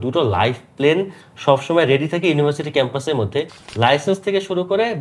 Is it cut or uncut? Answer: cut